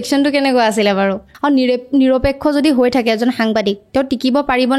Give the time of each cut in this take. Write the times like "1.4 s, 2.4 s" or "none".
1.3 s